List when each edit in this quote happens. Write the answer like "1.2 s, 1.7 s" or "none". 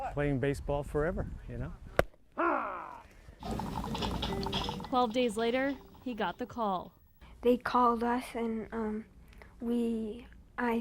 3.3 s